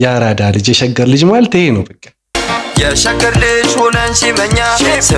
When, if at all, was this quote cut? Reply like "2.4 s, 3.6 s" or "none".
2.3 s

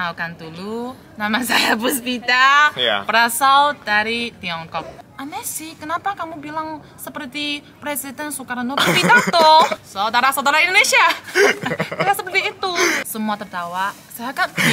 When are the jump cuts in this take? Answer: 5.0 s, 9.7 s, 11.2 s, 13.0 s

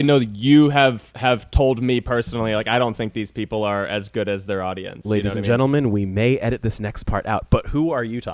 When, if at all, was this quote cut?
none

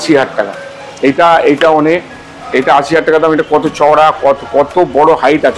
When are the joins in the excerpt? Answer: none

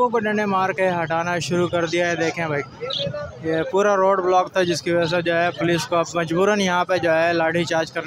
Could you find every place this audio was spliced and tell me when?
none

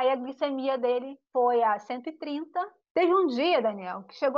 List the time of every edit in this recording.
2.8 s

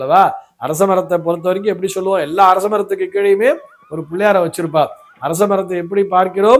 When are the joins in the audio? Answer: none

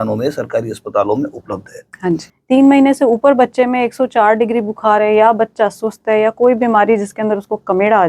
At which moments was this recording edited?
2.3 s

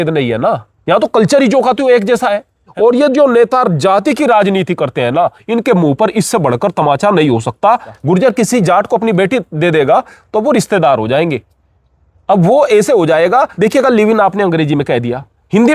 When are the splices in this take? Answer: 2.7 s, 7.9 s, 13.5 s

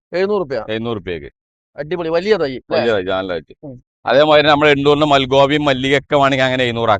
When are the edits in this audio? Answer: 3.8 s

